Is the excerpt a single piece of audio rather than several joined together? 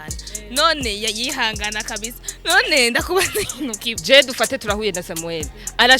no; 1 cut; at 3.9 s

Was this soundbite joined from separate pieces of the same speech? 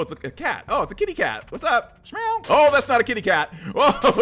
no; 0 cuts

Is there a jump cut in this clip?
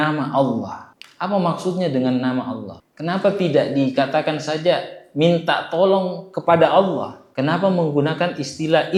no; 0 cuts

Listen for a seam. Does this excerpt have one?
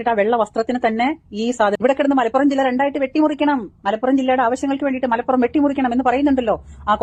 no; 0 cuts

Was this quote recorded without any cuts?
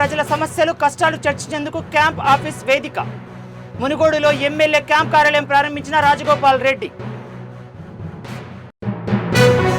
yes; 0 cuts

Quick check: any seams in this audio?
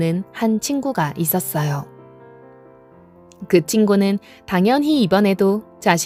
no; 0 cuts

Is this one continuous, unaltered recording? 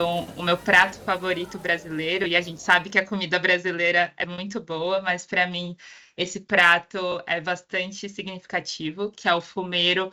yes; 0 cuts

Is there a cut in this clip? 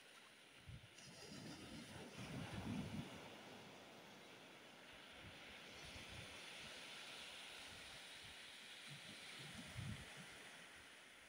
no; 0 cuts

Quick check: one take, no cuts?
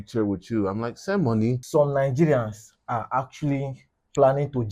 no; 1 cut; at 1.6 s

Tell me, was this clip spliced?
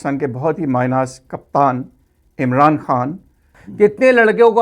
yes; 1 cut; at 3.6 s

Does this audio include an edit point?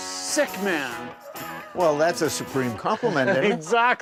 no; 0 cuts

